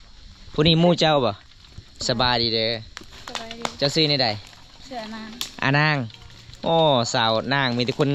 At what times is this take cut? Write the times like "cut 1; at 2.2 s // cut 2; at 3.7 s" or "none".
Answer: none